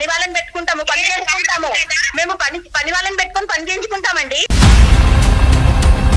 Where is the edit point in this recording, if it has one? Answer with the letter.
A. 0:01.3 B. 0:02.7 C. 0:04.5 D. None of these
C